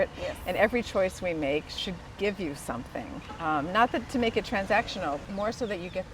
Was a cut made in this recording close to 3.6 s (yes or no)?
no